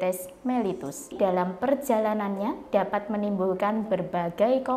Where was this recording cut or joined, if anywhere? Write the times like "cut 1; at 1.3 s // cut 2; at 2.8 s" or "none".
cut 1; at 1.1 s